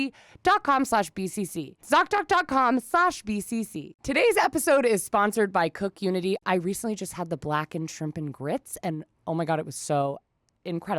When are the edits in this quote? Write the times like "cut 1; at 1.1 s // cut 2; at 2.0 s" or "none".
cut 1; at 3.9 s // cut 2; at 6.4 s